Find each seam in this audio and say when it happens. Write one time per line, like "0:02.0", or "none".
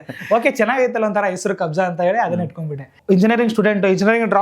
0:02.9